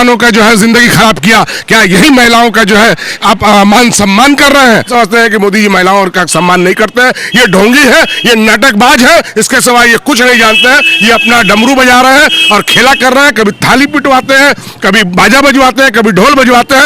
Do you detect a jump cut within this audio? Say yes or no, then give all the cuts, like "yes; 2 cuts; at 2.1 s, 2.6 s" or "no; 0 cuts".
yes; 1 cut; at 4.9 s